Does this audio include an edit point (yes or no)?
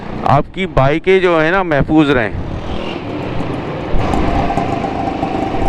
yes